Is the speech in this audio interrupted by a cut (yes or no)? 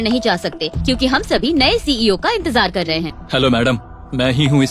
yes